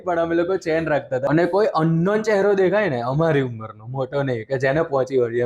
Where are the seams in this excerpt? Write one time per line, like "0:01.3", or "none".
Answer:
0:01.2